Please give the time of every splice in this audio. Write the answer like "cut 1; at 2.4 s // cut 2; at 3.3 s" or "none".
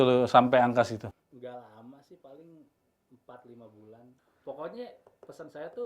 cut 1; at 1.3 s // cut 2; at 4.3 s